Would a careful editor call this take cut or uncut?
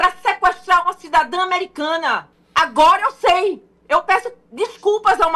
cut